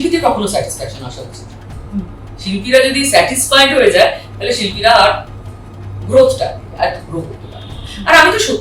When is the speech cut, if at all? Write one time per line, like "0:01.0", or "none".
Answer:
none